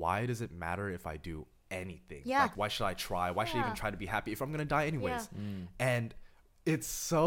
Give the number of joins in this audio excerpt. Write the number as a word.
one